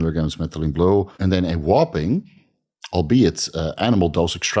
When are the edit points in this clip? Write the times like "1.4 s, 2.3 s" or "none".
1.1 s